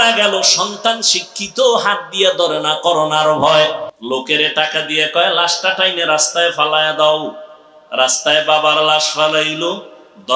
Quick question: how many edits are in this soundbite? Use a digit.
1